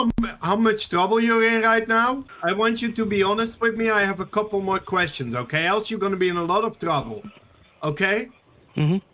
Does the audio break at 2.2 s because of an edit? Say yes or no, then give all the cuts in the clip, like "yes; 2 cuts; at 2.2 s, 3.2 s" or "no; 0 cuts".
yes; 1 cut; at 2.2 s